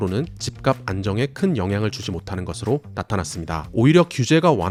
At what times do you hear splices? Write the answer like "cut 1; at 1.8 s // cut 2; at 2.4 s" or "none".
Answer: none